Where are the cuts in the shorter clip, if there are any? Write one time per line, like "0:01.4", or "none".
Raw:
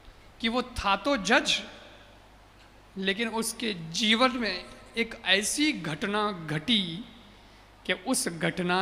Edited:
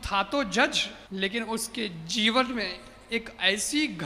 0:00.9